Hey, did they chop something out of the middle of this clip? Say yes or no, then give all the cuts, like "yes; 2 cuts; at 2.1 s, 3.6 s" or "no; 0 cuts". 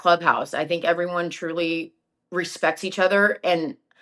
no; 0 cuts